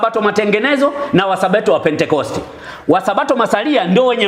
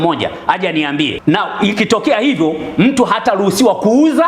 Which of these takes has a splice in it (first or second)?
second